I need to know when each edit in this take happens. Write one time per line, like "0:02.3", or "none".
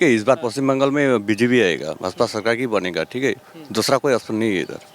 none